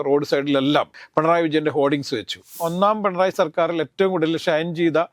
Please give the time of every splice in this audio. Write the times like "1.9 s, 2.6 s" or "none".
1.0 s, 2.6 s